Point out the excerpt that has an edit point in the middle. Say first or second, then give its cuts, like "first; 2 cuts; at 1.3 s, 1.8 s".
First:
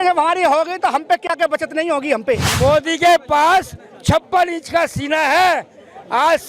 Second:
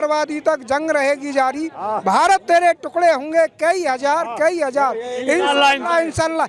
first; 1 cut; at 2.5 s